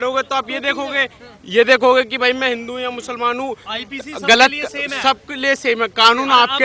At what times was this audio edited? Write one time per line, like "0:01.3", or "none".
none